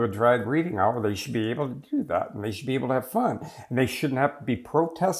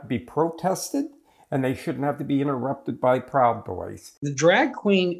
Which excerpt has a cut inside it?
second; 1 cut; at 4.0 s

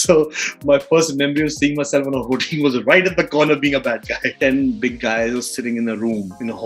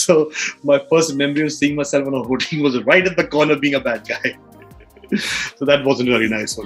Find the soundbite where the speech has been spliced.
first; 1 cut; at 4.3 s

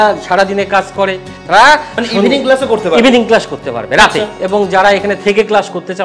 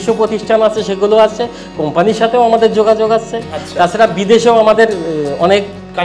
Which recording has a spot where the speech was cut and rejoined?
first; 2 cuts; at 1.3 s, 4.3 s

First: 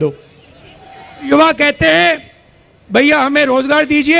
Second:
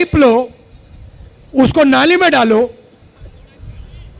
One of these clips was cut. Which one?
first; 1 cut; at 1.3 s

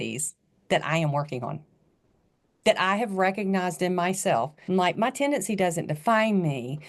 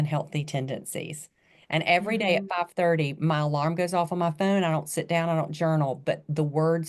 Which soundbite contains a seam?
first; 1 cut; at 4.6 s

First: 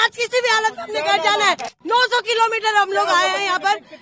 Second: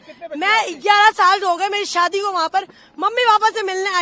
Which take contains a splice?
first; 1 cut; at 1.7 s

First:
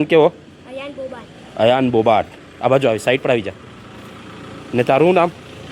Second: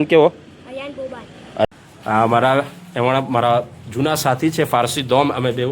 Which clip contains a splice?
second; 1 cut; at 1.7 s

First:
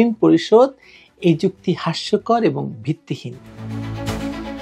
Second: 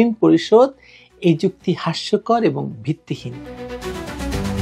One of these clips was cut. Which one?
first; 1 cut; at 3.6 s

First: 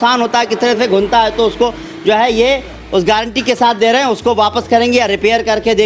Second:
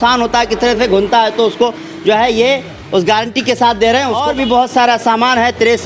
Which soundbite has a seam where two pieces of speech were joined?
second; 1 cut; at 4.2 s

